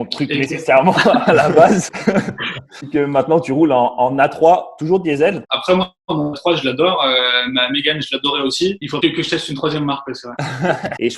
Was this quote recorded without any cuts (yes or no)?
yes